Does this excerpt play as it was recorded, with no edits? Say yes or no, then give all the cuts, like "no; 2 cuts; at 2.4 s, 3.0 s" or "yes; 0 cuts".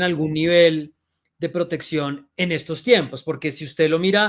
yes; 0 cuts